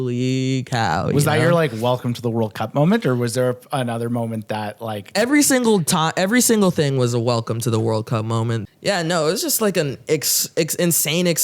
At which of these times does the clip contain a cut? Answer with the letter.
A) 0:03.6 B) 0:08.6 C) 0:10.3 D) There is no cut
B